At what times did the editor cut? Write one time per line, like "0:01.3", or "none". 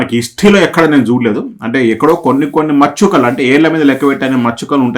none